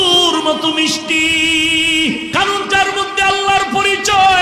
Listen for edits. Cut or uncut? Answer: cut